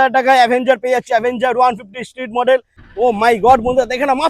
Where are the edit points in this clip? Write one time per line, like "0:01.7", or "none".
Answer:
0:02.8